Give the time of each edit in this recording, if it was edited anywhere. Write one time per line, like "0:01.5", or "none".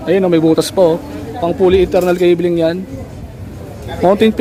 none

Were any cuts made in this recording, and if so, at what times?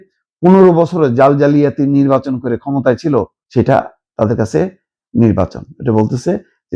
0:03.4

